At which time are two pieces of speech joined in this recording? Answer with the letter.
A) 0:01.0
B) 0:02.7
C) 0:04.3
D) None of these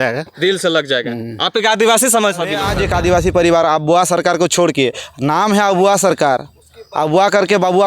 B